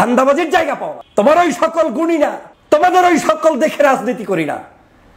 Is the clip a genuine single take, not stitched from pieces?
no; 2 cuts; at 0.9 s, 2.5 s

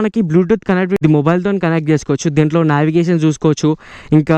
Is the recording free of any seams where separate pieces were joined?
no; 1 cut; at 1.0 s

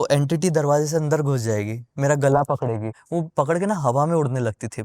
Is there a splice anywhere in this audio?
yes; 1 cut; at 3.0 s

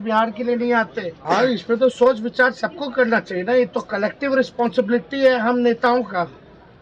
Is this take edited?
yes; 1 cut; at 1.2 s

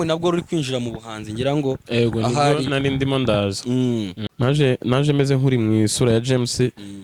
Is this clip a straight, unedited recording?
no; 1 cut; at 4.3 s

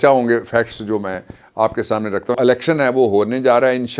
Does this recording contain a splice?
yes; 1 cut; at 2.4 s

